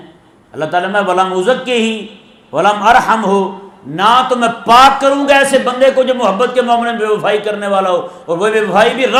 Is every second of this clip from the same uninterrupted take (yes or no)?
yes